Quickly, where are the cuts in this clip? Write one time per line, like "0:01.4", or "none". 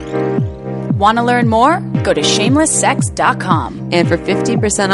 0:01.0